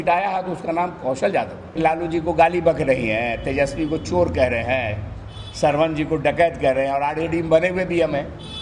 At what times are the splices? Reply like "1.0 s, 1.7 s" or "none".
1.8 s